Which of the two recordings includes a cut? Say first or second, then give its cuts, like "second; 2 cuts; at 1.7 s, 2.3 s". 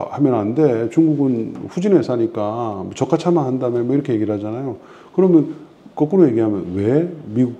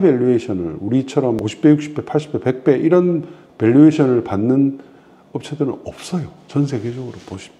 second; 1 cut; at 1.4 s